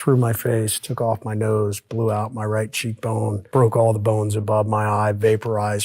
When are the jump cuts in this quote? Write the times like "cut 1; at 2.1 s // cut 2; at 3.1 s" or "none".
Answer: cut 1; at 3.4 s